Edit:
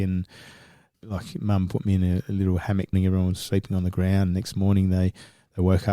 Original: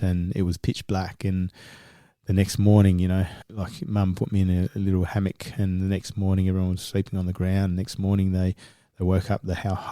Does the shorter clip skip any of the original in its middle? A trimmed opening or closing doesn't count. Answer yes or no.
yes